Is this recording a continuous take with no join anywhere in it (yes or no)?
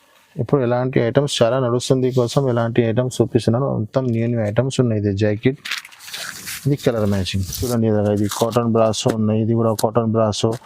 no